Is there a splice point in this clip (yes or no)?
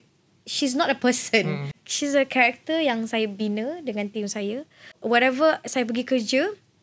yes